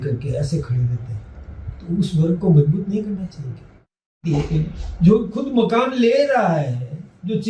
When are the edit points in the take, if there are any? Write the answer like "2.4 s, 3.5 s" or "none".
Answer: 4.0 s